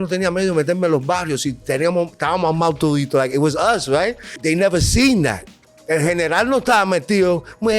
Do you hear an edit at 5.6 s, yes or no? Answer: no